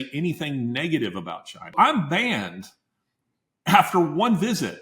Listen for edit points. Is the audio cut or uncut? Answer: cut